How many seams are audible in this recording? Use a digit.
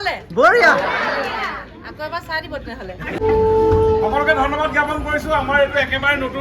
1